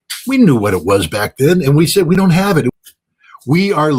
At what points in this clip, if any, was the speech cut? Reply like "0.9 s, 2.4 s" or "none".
2.7 s

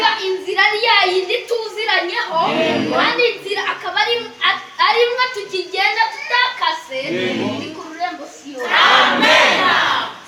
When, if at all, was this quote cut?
none

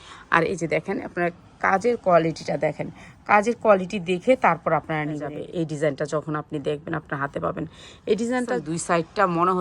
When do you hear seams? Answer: 5.3 s, 8.6 s

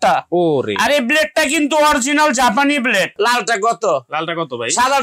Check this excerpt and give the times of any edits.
3.3 s

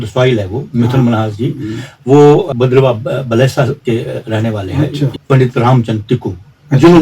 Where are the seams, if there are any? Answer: 2.5 s, 5.1 s

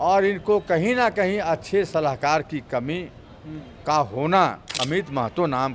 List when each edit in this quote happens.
4.7 s

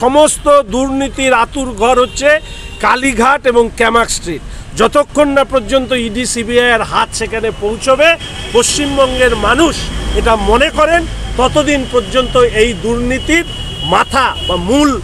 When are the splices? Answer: none

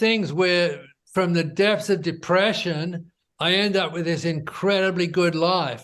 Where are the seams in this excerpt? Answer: none

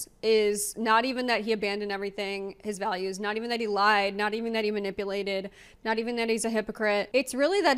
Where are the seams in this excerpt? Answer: none

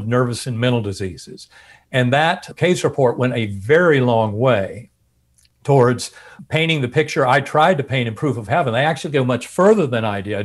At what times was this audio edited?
2.5 s, 6.3 s

